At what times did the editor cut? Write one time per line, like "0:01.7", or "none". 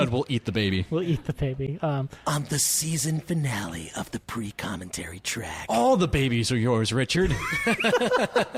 none